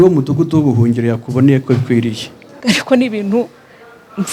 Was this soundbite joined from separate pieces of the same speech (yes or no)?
yes